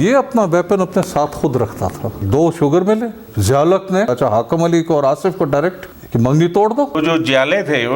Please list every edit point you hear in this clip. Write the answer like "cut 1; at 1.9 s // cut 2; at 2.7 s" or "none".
cut 1; at 2.2 s // cut 2; at 3.3 s // cut 3; at 4.1 s // cut 4; at 7.0 s